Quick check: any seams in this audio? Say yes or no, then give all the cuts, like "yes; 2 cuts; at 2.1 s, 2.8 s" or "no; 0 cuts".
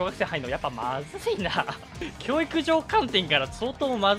no; 0 cuts